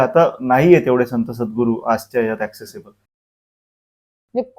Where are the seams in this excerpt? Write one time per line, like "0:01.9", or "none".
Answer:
0:03.6